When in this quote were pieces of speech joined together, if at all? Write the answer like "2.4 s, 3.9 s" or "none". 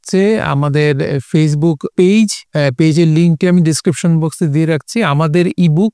1.8 s, 2.4 s